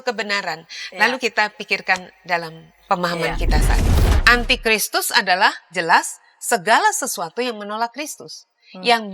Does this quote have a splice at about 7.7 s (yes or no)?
no